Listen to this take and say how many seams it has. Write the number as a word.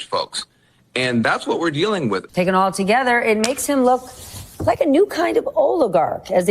one